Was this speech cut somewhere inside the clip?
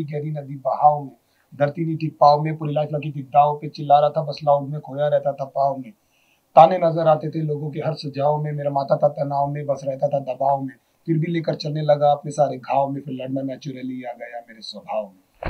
no; 0 cuts

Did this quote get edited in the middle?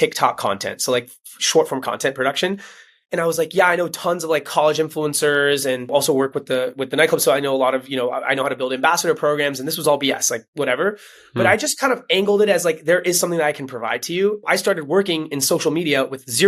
yes; 2 cuts; at 5.9 s, 14.4 s

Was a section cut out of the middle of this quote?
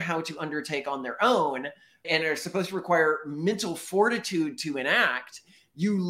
yes; 1 cut; at 2.0 s

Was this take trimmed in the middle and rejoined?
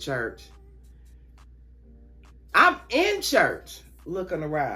no; 0 cuts

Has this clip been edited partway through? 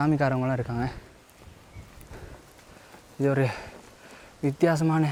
no; 0 cuts

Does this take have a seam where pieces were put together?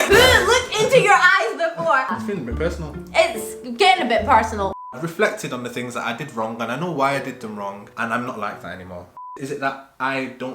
yes; 3 cuts; at 2.1 s, 4.7 s, 9.1 s

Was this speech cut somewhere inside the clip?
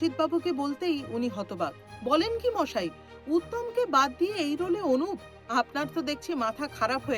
no; 0 cuts

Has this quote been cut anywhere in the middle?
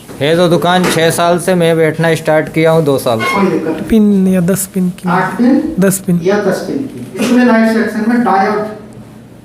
yes; 2 cuts; at 3.8 s, 7.1 s

